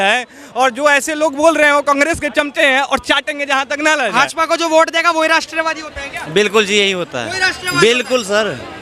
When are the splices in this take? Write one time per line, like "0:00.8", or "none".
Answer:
0:04.1